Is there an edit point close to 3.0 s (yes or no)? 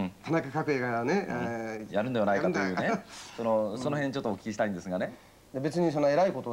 no